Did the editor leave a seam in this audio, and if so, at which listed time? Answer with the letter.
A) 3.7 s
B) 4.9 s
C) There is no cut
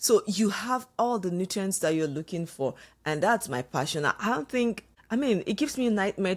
B